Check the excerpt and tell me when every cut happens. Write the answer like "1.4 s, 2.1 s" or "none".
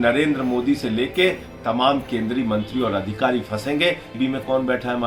4.1 s